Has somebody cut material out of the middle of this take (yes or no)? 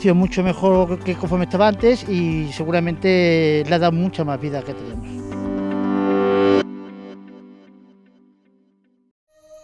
no